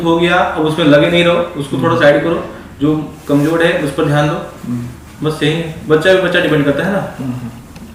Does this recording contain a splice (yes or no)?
no